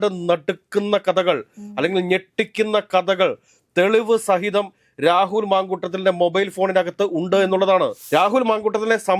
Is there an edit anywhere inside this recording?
yes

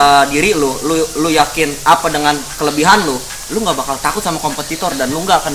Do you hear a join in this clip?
no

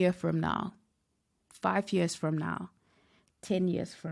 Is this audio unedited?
yes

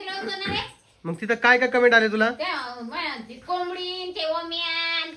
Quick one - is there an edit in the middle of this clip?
no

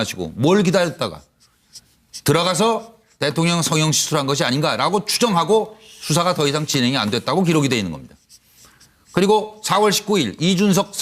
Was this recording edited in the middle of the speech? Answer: yes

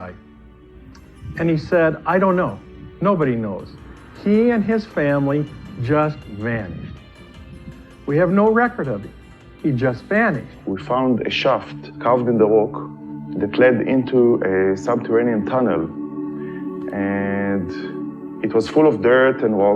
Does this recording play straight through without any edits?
no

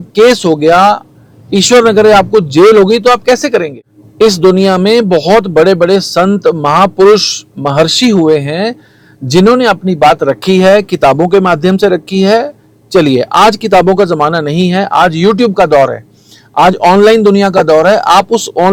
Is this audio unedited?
yes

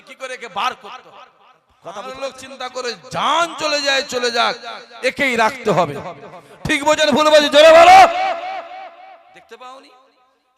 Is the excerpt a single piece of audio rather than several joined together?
no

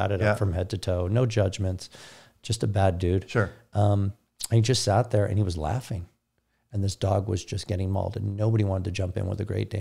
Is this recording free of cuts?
yes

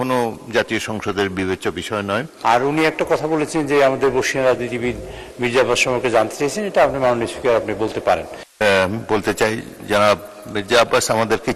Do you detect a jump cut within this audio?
yes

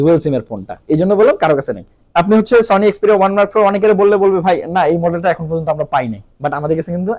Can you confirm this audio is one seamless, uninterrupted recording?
no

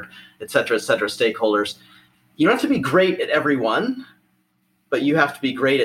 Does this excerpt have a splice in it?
no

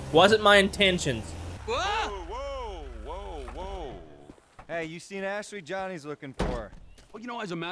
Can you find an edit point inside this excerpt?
yes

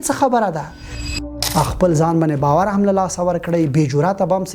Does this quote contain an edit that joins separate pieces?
yes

